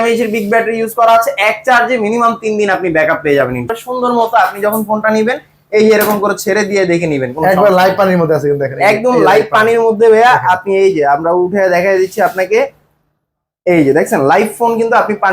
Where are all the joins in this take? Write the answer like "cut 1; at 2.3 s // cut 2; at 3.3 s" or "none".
cut 1; at 3.7 s